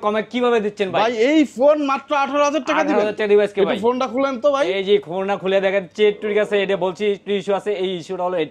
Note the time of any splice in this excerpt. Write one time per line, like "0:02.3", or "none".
none